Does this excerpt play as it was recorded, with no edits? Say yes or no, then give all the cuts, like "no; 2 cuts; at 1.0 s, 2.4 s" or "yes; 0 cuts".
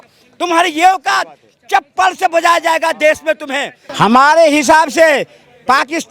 no; 1 cut; at 3.8 s